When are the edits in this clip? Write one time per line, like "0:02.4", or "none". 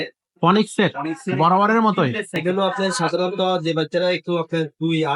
0:02.4